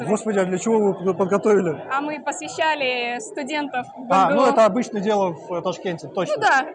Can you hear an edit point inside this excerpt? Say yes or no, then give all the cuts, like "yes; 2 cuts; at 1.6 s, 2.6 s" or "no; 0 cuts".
no; 0 cuts